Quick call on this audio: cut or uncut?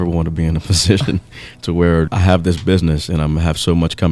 cut